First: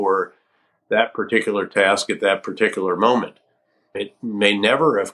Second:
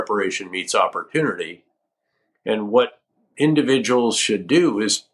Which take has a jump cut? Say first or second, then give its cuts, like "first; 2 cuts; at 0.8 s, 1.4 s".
first; 1 cut; at 4.0 s